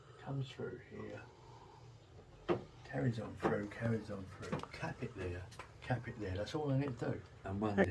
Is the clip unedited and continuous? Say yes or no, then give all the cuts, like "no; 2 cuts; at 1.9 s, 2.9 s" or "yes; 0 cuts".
yes; 0 cuts